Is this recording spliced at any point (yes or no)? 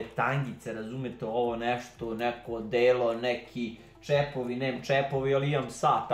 no